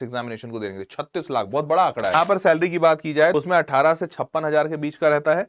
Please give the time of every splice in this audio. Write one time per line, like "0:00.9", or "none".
0:02.1
0:03.3